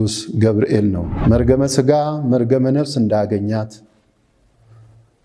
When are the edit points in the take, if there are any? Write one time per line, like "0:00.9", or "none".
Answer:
0:01.1